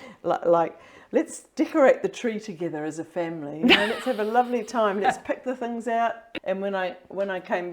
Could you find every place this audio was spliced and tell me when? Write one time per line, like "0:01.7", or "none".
0:06.3